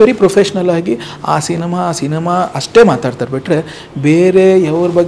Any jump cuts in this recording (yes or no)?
no